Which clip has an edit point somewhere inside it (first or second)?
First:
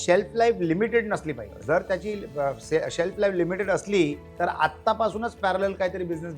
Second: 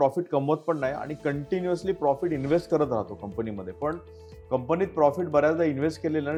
first